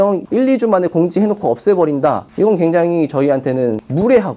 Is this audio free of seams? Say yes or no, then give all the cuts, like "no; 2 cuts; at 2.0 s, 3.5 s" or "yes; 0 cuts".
yes; 0 cuts